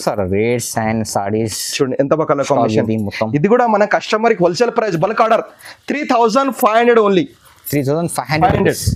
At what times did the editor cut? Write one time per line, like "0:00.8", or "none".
none